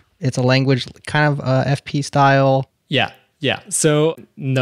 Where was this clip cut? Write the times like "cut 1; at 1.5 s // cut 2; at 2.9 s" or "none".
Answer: none